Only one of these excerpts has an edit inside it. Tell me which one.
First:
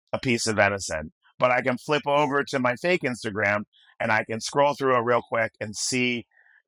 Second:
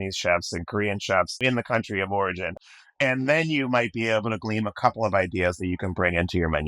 second; 2 cuts; at 1.4 s, 2.6 s

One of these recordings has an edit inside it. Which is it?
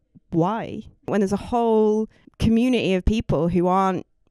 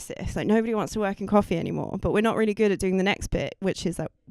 first; 2 cuts; at 1.1 s, 2.2 s

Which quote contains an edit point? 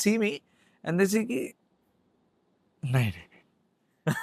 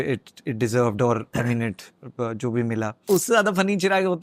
second; 1 cut; at 3.1 s

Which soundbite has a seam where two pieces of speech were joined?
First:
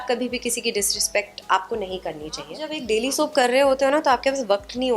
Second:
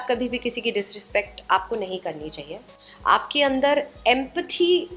first; 1 cut; at 2.7 s

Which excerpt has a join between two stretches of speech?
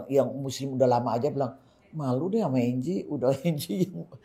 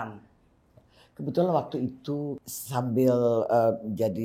second; 1 cut; at 2.4 s

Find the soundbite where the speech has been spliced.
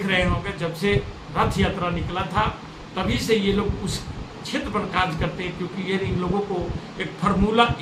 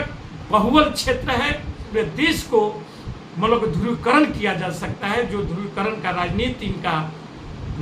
second; 1 cut; at 1.9 s

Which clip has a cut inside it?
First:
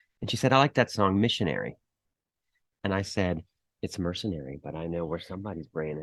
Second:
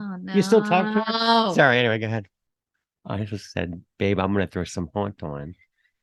second; 1 cut; at 2.3 s

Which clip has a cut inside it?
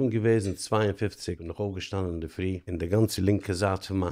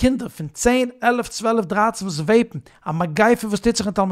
first; 2 cuts; at 1.4 s, 2.6 s

